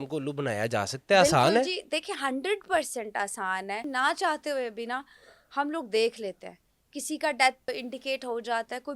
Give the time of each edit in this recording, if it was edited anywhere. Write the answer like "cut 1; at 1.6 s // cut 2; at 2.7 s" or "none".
cut 1; at 3.8 s // cut 2; at 7.7 s